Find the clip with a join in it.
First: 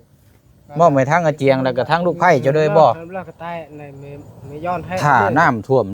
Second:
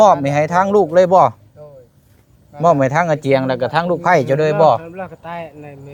first; 1 cut; at 5.0 s

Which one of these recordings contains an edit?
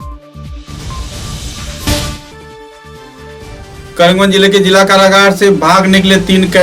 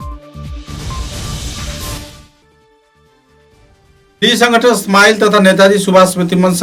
first; 1 cut; at 1.9 s

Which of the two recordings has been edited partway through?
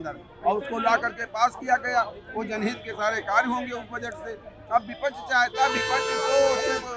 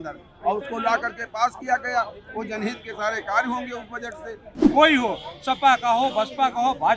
second; 1 cut; at 4.6 s

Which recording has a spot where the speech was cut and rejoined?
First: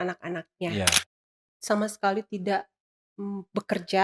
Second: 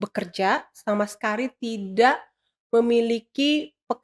first; 1 cut; at 1.1 s

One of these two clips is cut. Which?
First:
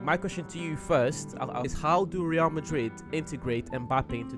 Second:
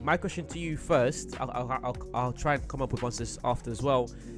first; 1 cut; at 1.7 s

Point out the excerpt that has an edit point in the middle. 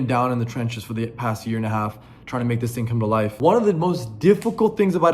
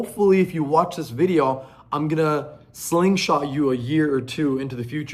first; 1 cut; at 3.3 s

